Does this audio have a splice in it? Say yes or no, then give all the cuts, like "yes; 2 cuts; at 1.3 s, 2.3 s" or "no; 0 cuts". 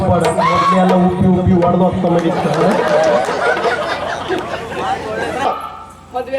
yes; 1 cut; at 5.5 s